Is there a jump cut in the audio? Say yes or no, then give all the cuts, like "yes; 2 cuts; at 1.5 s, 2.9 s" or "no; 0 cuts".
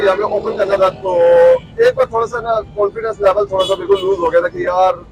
no; 0 cuts